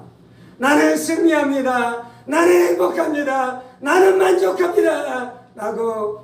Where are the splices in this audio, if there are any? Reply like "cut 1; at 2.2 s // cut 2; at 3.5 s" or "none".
none